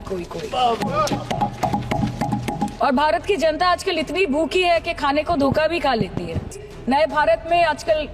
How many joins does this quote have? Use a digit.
2